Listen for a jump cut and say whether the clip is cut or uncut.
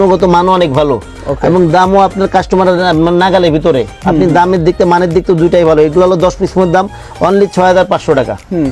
uncut